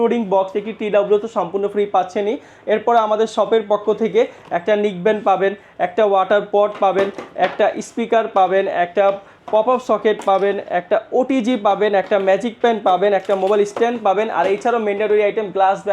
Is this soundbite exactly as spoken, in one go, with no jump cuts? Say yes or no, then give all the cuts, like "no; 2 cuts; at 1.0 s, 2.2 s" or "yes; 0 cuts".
yes; 0 cuts